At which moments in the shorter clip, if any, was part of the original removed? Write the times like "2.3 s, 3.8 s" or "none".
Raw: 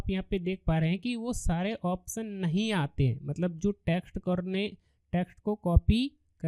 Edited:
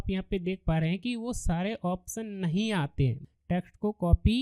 3.2 s